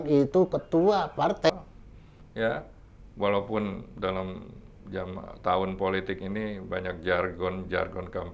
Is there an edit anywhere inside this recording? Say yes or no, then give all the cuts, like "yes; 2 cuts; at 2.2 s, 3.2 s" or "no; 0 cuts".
yes; 1 cut; at 1.5 s